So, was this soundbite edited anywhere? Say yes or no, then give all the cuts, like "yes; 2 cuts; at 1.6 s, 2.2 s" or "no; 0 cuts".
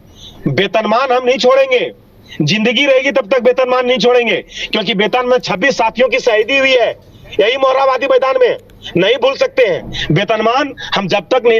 no; 0 cuts